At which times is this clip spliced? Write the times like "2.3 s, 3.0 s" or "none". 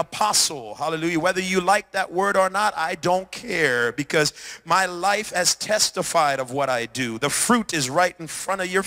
none

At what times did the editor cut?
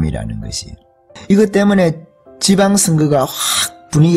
none

